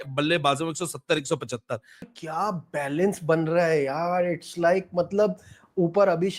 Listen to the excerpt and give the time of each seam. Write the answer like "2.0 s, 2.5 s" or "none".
2.1 s